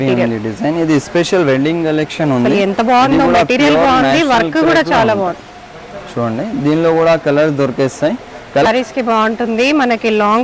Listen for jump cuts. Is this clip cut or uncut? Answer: cut